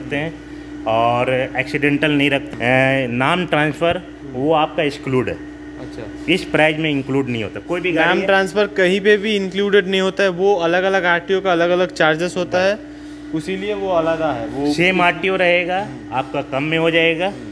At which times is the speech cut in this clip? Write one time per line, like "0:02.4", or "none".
0:02.5